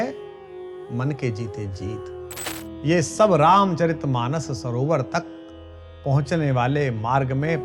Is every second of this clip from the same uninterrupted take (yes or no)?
no